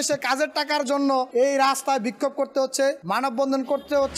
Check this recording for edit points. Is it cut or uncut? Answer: cut